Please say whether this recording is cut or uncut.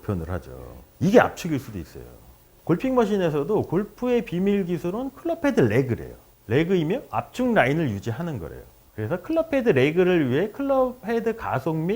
uncut